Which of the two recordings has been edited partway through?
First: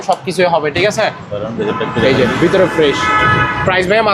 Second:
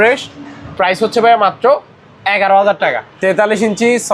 second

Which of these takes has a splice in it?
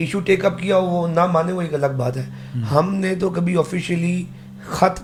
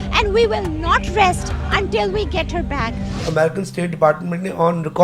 second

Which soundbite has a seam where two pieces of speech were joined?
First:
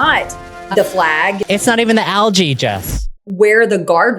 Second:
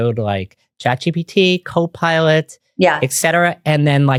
first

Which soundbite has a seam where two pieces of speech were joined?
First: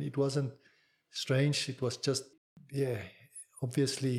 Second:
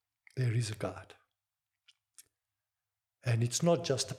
first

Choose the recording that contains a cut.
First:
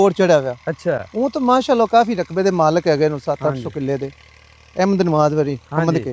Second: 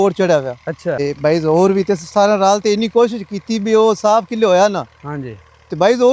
second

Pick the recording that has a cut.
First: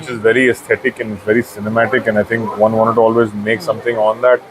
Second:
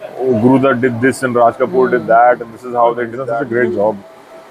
second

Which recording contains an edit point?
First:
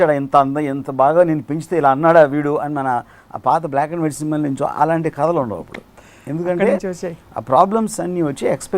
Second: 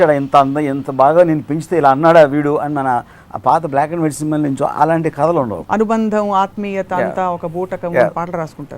second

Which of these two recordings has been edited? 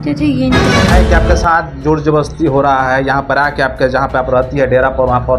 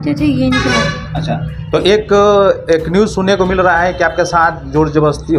first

